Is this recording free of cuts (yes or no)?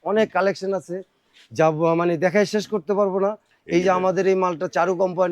yes